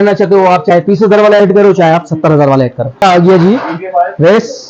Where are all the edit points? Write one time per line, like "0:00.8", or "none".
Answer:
0:03.0